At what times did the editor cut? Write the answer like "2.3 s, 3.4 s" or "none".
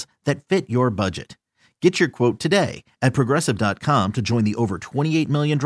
none